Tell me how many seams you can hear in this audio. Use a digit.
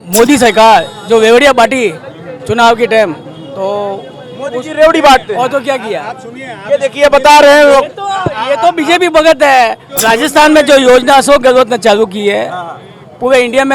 1